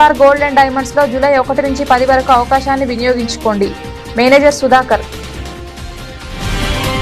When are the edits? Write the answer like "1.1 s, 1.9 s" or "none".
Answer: 5.0 s